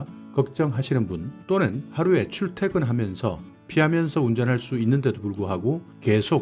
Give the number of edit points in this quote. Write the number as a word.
one